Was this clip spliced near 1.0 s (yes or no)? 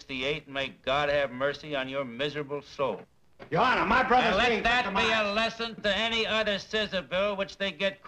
no